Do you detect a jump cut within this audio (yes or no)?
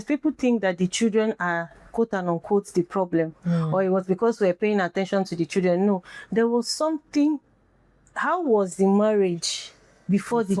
no